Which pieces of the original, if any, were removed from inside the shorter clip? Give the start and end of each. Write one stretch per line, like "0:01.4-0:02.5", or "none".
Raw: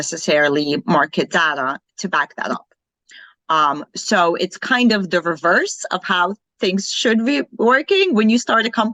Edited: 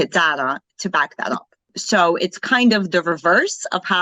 0:02.9-0:03.9